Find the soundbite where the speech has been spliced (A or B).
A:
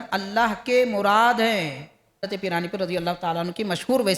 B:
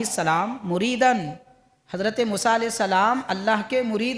A